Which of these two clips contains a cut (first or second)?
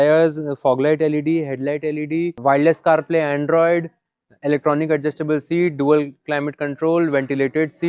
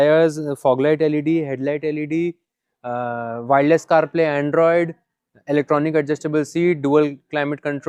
first